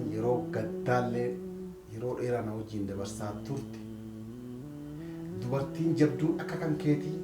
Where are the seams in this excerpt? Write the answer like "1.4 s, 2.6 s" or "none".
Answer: 3.6 s, 5.4 s